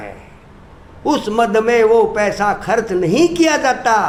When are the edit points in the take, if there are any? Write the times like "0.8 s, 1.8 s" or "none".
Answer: none

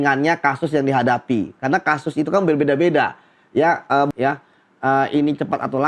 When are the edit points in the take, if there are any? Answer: 4.1 s

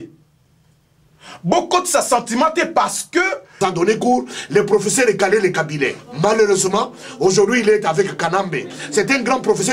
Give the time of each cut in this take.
3.5 s

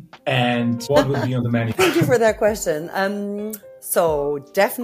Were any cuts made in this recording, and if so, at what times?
0.8 s, 1.7 s

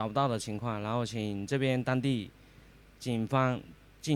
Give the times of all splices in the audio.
none

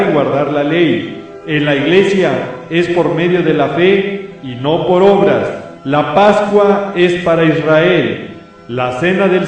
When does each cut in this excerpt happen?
7.4 s

